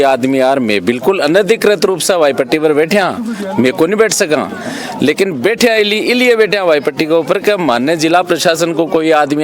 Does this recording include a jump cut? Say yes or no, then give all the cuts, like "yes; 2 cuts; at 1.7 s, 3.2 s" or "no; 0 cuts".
no; 0 cuts